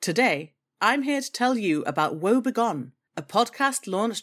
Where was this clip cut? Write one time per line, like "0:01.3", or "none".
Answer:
none